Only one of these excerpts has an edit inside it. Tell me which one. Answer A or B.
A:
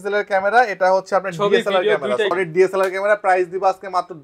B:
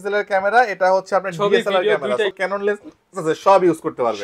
B